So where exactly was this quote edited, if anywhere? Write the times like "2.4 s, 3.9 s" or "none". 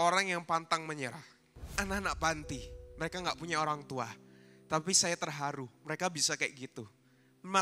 1.8 s

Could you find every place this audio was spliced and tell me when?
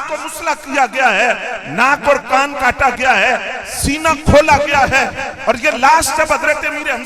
none

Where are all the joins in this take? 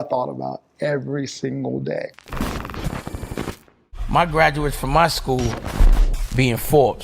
2.3 s

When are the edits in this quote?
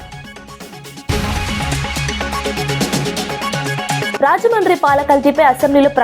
1.1 s, 4.2 s

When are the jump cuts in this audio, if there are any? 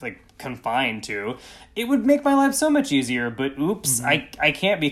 none

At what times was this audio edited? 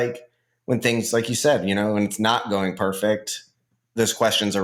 none

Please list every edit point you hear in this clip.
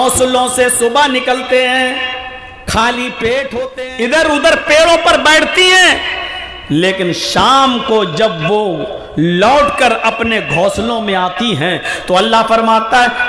3.7 s

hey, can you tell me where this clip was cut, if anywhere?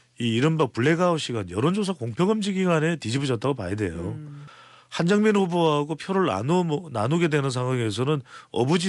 4.4 s

